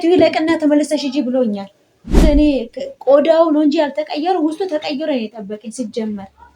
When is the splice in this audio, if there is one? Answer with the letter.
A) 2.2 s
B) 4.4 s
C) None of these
A